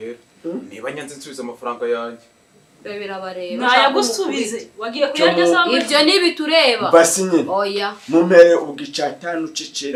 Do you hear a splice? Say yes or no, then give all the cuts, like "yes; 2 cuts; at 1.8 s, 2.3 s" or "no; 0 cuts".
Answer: no; 0 cuts